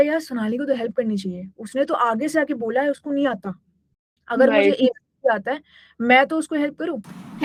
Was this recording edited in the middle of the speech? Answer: no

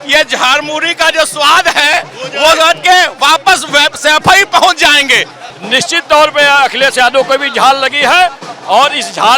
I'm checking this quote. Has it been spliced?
yes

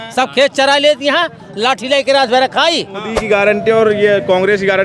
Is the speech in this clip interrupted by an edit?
yes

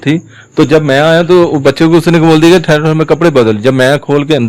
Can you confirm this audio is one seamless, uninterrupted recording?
yes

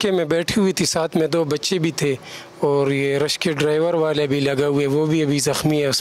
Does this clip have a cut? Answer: no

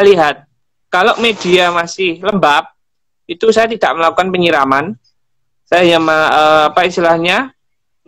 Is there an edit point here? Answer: no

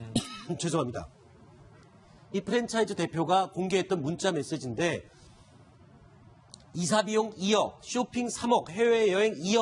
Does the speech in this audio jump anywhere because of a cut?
no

